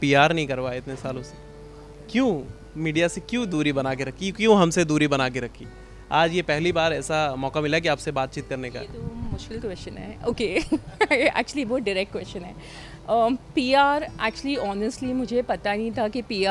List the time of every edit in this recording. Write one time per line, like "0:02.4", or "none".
none